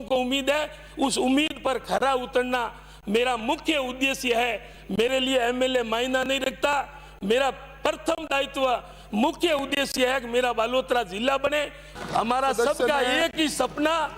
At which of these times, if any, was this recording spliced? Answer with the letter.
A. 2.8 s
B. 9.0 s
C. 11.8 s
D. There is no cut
C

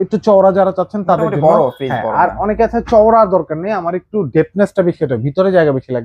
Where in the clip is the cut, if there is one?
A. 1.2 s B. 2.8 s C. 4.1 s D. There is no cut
D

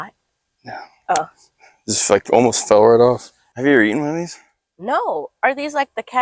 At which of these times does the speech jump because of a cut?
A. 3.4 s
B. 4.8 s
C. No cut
A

